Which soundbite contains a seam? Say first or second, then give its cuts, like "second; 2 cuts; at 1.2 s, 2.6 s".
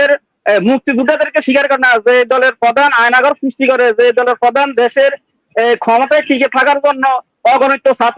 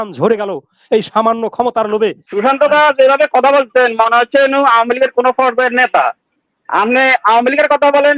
second; 1 cut; at 2.3 s